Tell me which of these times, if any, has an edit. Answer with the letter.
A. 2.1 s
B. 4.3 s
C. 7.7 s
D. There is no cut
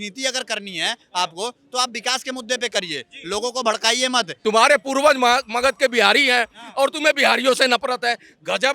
B